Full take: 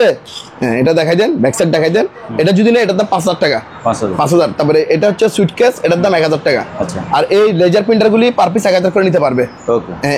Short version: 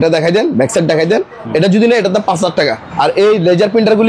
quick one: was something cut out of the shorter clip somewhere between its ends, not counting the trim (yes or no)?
yes